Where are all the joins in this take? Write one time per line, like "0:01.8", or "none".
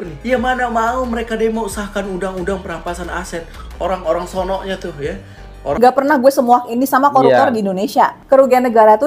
0:05.8